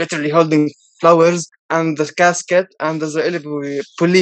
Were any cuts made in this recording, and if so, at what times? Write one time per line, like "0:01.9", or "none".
0:01.5